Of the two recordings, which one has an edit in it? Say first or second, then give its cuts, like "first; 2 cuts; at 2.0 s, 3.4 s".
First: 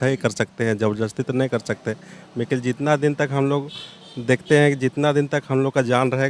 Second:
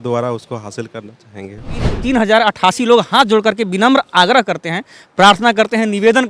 second; 1 cut; at 1.9 s